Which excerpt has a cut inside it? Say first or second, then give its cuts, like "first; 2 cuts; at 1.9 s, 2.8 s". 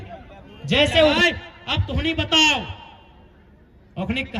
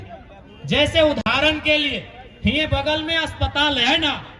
first; 1 cut; at 1.2 s